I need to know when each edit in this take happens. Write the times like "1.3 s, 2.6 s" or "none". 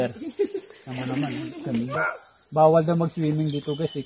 2.0 s